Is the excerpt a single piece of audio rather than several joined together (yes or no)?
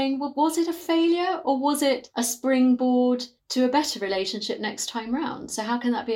no